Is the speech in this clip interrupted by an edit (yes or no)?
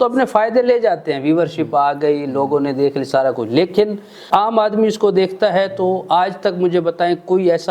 yes